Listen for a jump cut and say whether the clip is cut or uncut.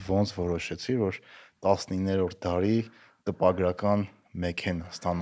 uncut